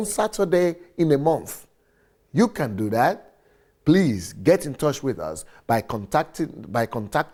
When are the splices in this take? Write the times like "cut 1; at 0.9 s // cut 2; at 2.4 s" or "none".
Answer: none